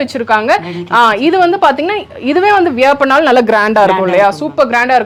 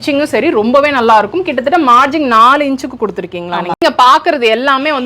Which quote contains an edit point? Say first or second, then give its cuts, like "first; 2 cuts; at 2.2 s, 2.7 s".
second; 1 cut; at 3.8 s